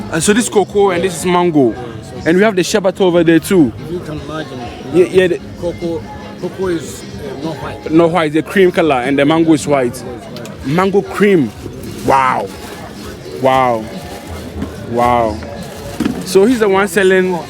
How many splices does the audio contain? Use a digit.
0